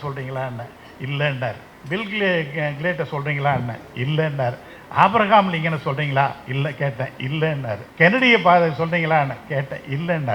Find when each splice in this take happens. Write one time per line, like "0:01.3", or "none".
0:01.7
0:07.9